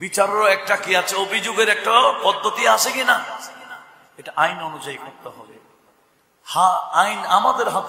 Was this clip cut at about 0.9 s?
no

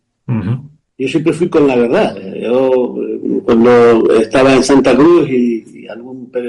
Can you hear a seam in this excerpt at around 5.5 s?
no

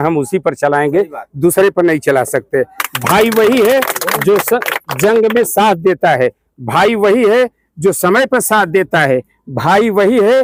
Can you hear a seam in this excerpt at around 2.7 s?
no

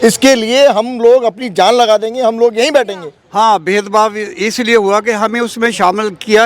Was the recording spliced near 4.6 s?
no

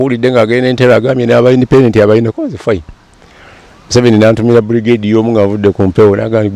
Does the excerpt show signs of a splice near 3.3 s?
no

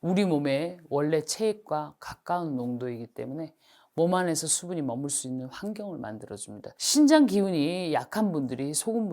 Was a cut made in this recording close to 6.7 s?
yes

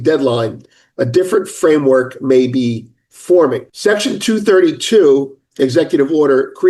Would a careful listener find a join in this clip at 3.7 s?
yes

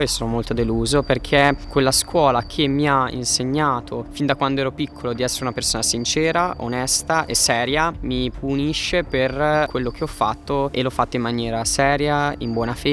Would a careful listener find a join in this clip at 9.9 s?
no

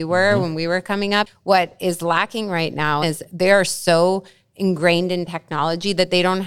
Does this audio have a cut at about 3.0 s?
yes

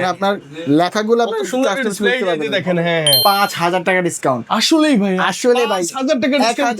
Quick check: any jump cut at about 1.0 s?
no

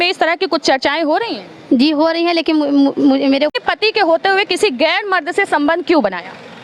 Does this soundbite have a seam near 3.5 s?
yes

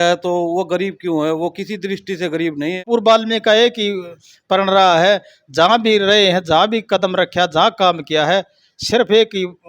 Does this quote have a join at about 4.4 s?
no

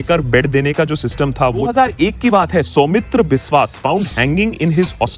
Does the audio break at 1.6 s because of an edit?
yes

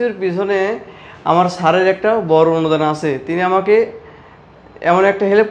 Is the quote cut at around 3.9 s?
no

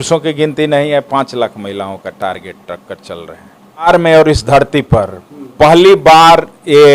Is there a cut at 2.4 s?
no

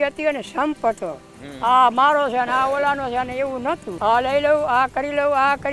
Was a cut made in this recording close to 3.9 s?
yes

